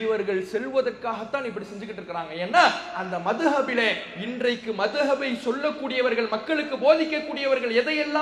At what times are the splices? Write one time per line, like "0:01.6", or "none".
none